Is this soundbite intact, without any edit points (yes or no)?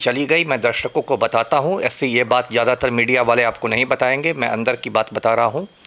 yes